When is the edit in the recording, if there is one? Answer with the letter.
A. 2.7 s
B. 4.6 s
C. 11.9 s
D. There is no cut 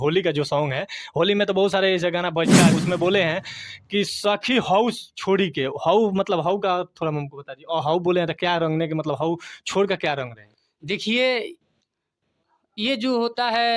A